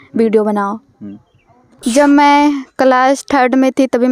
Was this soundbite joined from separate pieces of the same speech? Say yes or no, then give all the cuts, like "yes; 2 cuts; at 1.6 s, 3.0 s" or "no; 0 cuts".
yes; 1 cut; at 1.7 s